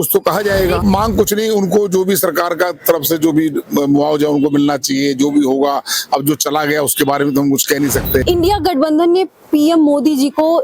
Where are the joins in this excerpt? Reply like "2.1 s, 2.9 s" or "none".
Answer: 0.8 s, 8.2 s